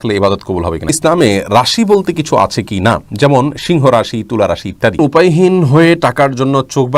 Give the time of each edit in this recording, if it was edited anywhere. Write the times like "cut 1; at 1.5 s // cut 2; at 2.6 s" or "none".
cut 1; at 0.9 s // cut 2; at 5.0 s